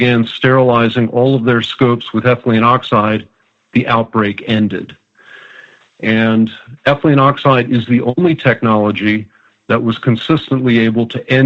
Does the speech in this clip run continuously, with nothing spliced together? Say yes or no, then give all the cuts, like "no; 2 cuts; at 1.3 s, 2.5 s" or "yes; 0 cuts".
yes; 0 cuts